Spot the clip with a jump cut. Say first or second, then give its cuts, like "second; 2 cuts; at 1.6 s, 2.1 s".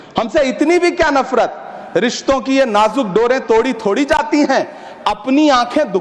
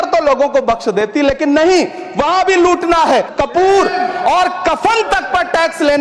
second; 1 cut; at 3.3 s